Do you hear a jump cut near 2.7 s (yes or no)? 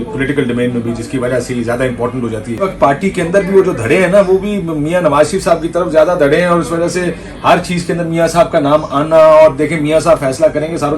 yes